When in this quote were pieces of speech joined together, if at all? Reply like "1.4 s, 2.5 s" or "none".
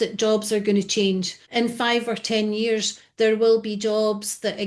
1.4 s